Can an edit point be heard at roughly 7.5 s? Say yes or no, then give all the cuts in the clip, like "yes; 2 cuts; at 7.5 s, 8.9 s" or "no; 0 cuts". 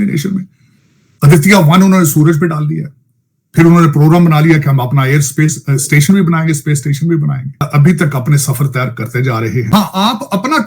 yes; 2 cuts; at 7.5 s, 9.7 s